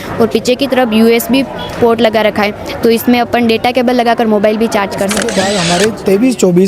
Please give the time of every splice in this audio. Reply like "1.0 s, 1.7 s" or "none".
5.6 s